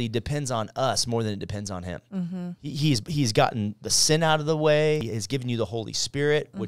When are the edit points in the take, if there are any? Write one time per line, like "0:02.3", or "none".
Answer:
0:05.0